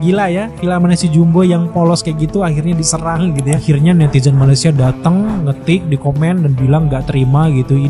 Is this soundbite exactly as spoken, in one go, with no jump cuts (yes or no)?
no